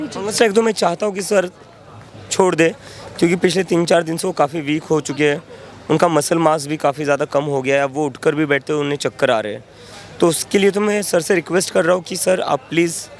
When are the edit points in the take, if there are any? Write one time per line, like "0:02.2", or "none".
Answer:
none